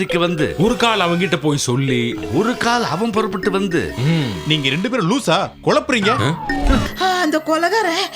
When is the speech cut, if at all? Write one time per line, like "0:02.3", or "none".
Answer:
0:06.9